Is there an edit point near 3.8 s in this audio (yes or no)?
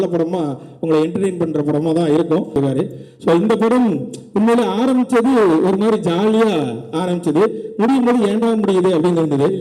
no